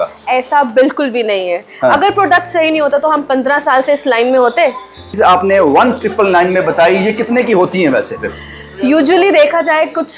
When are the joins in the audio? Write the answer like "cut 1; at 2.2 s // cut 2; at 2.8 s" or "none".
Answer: cut 1; at 5.1 s